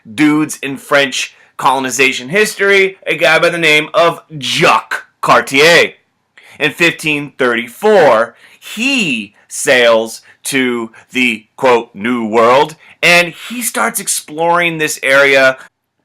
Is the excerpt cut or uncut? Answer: cut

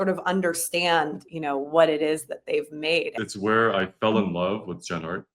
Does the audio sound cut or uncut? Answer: cut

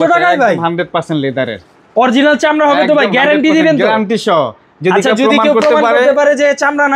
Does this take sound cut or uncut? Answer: uncut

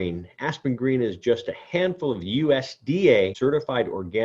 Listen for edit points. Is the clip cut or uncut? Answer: cut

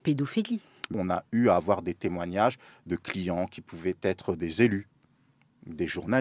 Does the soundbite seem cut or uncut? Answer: cut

